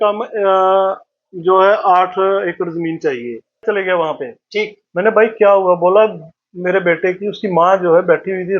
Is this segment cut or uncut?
cut